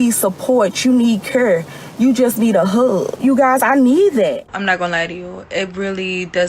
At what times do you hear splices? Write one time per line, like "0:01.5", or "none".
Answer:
0:03.2
0:04.5

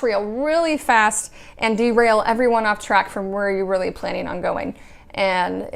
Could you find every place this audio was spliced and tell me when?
none

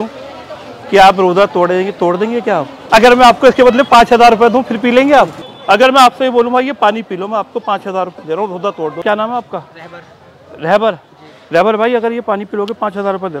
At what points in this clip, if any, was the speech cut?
0:02.8
0:05.5
0:09.0

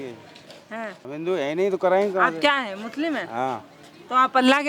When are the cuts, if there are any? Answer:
0:01.0

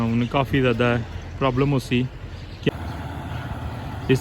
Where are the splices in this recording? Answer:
0:02.7

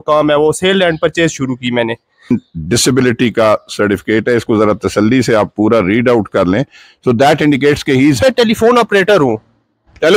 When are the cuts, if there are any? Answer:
0:02.3
0:08.2

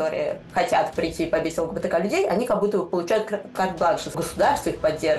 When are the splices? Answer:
0:04.1

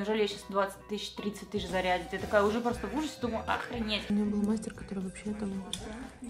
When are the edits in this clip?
0:04.0

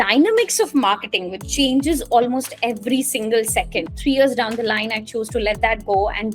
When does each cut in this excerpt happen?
0:03.9

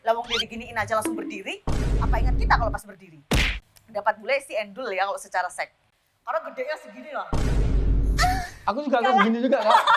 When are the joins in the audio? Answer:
0:03.5

